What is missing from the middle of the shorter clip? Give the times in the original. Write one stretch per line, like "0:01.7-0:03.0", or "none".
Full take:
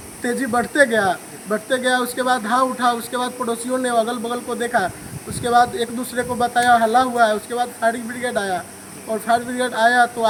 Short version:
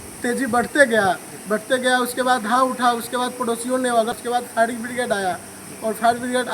0:04.2-0:07.4

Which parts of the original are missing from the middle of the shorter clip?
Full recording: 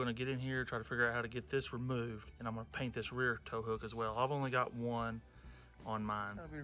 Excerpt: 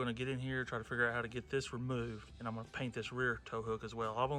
none

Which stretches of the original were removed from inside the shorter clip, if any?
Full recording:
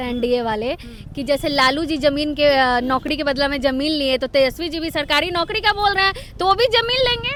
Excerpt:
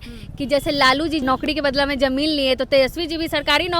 0:02.0-0:02.8

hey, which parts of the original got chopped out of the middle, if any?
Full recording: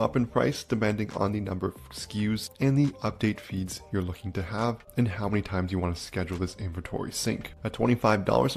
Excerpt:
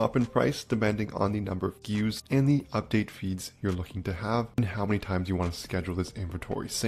0:02.1-0:02.4
0:04.9-0:05.0

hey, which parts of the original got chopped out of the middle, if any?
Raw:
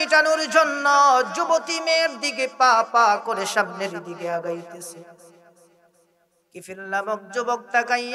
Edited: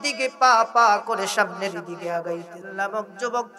0:04.8-0:06.7

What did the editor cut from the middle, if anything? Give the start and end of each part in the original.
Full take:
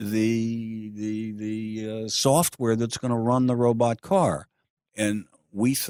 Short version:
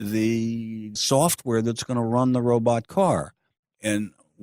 0:00.9-0:02.1

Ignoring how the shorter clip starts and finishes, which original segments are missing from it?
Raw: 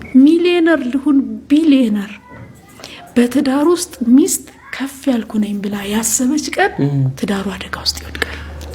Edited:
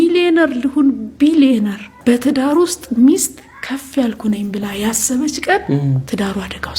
0:02.2-0:03.0

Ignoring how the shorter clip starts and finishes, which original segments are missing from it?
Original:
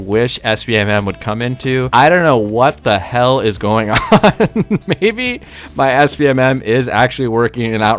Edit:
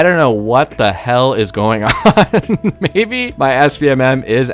0:05.3-0:05.6

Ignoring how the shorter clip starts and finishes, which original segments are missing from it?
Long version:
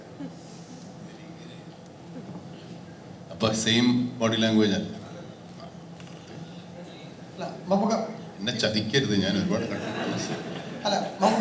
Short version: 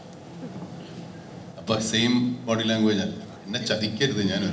0:05.1-0:08.3

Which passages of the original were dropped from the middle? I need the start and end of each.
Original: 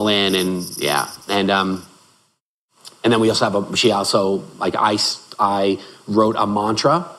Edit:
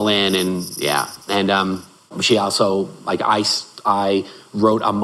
0:02.2-0:03.7

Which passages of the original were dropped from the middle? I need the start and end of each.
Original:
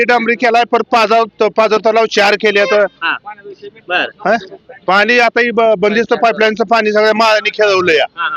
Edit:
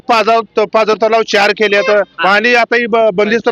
0:03.0-0:04.8

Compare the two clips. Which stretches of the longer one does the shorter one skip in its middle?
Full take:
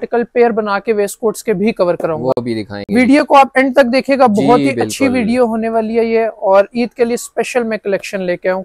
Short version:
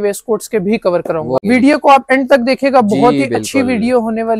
0:02.4-0:02.9

